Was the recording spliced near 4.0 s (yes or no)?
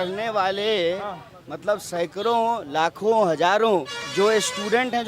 yes